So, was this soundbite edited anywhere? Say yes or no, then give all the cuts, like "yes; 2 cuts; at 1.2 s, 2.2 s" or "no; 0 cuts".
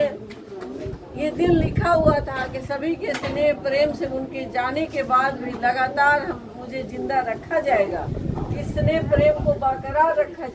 no; 0 cuts